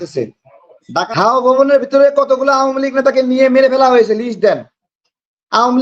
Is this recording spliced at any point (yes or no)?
yes